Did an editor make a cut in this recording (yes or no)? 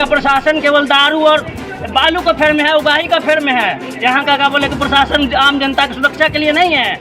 no